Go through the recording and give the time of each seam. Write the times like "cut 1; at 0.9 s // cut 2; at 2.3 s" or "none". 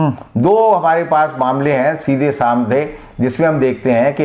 none